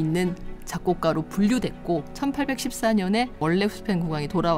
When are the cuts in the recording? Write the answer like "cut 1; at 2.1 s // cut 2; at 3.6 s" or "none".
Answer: cut 1; at 2.1 s // cut 2; at 3.4 s